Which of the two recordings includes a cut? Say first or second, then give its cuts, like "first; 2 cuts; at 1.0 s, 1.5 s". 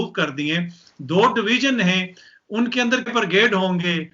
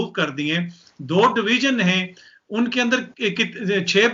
first; 1 cut; at 3.1 s